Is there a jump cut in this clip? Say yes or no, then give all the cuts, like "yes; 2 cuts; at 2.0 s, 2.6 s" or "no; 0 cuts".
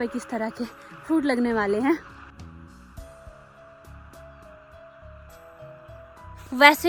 no; 0 cuts